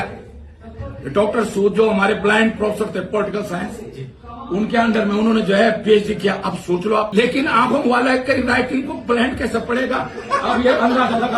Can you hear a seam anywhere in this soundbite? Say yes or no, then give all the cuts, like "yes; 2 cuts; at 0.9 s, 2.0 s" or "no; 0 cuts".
yes; 1 cut; at 7.1 s